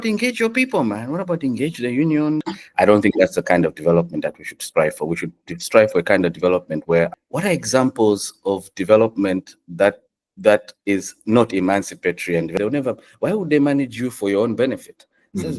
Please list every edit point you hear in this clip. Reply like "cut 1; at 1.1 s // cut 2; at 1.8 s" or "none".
cut 1; at 2.6 s // cut 2; at 7.1 s // cut 3; at 12.5 s